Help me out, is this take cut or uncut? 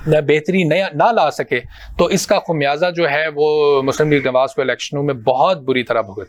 uncut